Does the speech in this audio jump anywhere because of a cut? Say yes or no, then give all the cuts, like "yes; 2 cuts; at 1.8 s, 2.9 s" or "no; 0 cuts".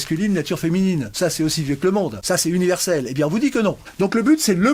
yes; 3 cuts; at 1.1 s, 2.2 s, 3.9 s